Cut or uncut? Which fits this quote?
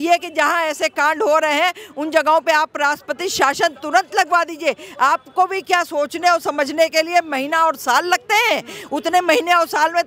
uncut